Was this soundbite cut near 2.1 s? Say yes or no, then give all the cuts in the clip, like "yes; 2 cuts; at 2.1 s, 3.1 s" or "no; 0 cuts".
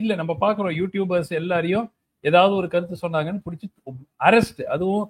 no; 0 cuts